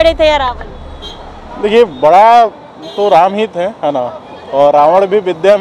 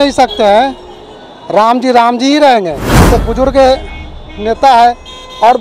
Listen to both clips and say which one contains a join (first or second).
second